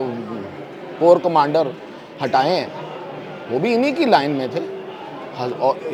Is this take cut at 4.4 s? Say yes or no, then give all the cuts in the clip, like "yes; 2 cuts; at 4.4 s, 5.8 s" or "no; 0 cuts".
no; 0 cuts